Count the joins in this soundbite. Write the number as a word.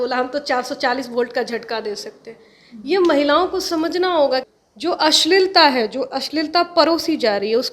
one